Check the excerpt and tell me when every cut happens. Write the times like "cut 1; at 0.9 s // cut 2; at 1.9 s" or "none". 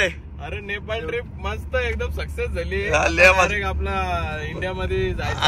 none